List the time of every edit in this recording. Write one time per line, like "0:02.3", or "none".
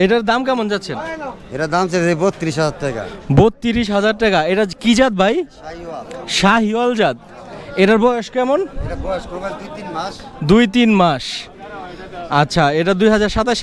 none

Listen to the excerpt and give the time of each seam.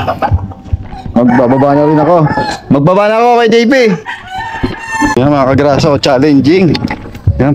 0:05.2

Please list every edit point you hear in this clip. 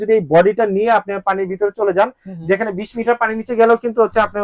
none

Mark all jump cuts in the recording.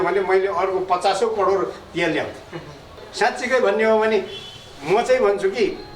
0:03.0

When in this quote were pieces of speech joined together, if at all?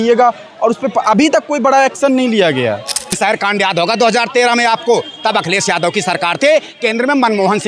0:03.2

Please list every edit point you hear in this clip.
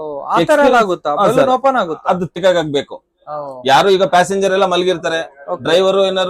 0:02.4

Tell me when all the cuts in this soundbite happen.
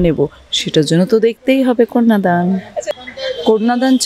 0:02.9

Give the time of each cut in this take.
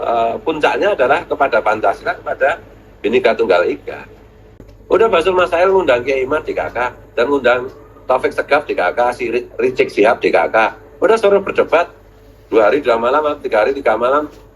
0:04.6

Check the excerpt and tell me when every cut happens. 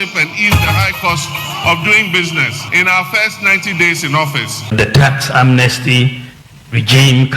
0:02.6
0:04.7

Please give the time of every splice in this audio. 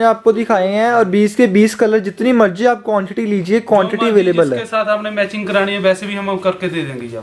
none

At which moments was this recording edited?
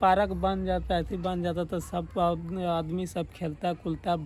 none

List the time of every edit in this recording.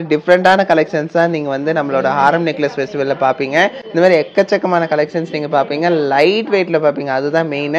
none

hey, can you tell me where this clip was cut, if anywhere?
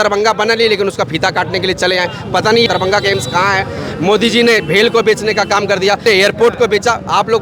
0:02.7
0:06.0

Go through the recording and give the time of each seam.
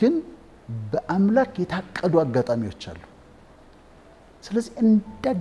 none

